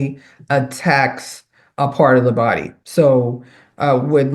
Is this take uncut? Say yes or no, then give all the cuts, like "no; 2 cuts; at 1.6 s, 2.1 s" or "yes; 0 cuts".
yes; 0 cuts